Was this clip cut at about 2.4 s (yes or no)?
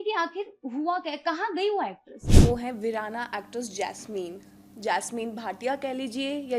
yes